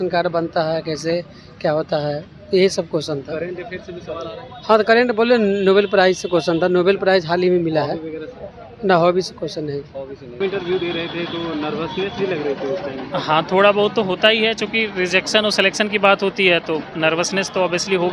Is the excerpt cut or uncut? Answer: cut